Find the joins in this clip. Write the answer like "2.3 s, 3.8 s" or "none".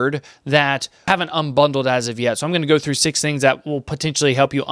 1.1 s